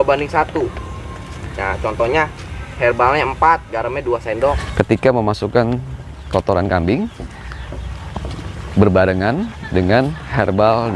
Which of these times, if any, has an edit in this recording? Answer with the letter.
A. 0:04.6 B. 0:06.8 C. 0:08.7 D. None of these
A